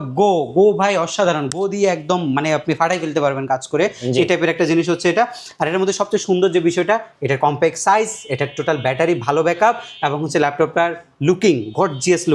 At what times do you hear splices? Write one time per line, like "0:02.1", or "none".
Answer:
none